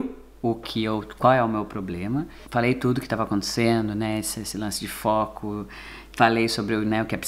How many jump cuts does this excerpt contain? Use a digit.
0